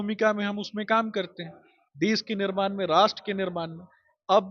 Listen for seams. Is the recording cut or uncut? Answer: uncut